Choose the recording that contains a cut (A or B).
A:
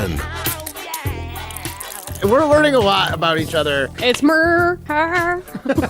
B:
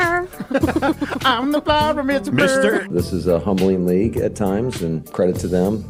A